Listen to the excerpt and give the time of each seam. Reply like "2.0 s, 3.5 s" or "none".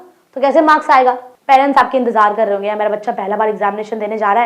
1.3 s